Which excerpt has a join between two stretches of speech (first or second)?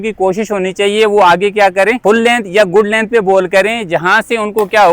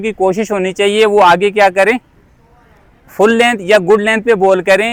first